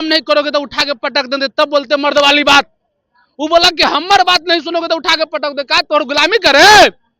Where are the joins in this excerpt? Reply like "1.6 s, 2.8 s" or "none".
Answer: none